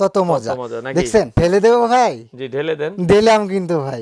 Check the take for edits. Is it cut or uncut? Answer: cut